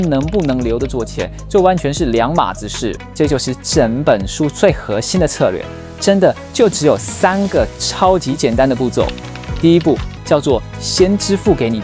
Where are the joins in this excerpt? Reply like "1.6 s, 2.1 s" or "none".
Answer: 3.0 s, 10.1 s